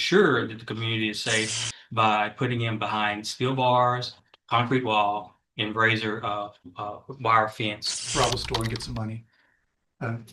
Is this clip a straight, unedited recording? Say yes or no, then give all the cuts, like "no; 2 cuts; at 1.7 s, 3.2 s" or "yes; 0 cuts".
no; 1 cut; at 8.0 s